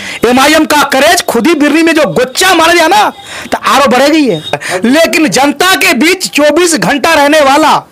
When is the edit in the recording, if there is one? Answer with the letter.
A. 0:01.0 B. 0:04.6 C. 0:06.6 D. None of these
B